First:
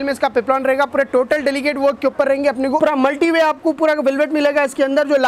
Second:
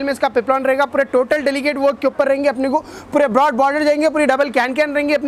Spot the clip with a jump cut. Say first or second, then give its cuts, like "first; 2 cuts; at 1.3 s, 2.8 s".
first; 1 cut; at 2.8 s